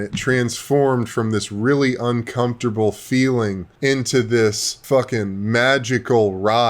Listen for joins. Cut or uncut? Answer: cut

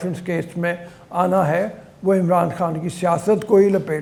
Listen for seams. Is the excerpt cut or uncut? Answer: uncut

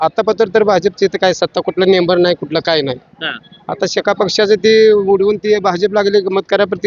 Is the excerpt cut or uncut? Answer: uncut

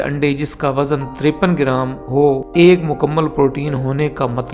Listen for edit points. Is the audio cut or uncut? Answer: cut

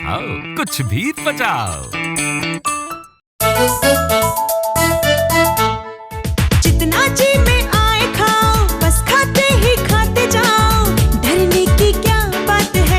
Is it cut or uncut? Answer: cut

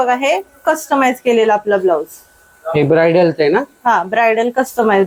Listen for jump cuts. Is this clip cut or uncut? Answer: uncut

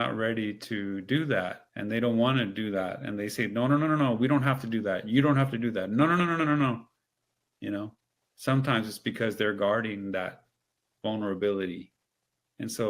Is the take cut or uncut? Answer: cut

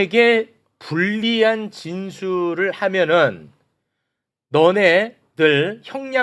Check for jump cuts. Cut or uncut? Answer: uncut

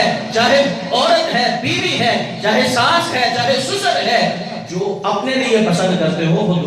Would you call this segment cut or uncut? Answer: uncut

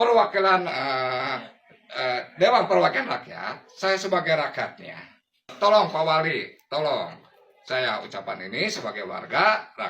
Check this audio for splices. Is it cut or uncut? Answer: cut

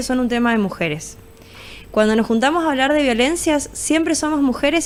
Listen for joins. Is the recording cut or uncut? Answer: uncut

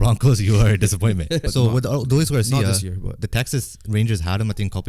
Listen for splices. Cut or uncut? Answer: cut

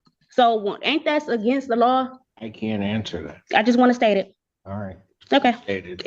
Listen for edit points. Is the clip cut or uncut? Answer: cut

